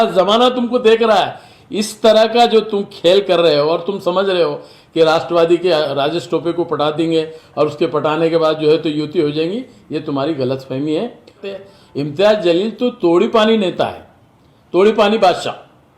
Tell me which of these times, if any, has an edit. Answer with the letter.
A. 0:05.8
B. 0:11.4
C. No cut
B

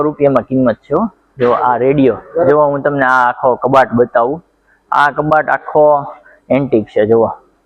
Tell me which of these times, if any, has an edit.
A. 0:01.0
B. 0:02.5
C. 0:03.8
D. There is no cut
B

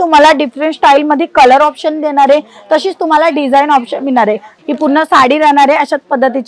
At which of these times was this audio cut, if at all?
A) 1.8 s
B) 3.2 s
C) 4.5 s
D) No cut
C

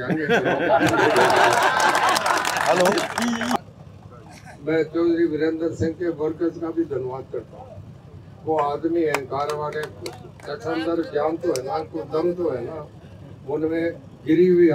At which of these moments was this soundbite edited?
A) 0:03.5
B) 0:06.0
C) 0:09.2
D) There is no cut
A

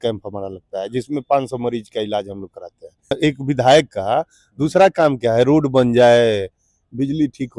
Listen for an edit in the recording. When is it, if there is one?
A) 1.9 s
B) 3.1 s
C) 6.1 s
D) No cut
B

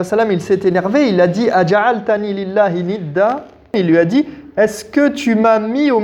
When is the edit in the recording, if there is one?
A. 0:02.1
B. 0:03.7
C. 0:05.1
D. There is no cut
B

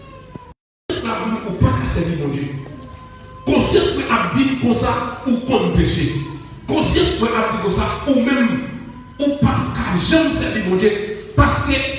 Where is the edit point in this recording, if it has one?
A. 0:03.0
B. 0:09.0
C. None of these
C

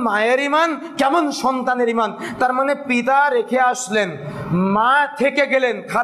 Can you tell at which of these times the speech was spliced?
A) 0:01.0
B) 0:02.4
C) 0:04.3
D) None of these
D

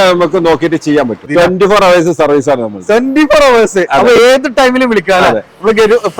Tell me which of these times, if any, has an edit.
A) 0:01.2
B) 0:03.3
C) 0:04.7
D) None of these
A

